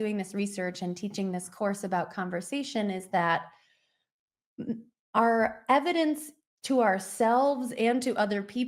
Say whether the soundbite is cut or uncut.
uncut